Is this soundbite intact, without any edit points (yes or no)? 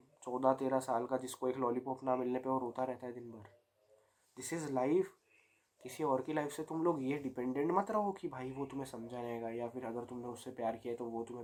yes